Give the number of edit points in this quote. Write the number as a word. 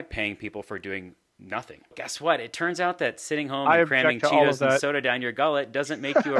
one